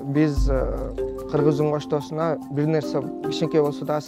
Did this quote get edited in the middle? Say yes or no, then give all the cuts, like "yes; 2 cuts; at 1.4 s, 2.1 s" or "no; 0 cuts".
no; 0 cuts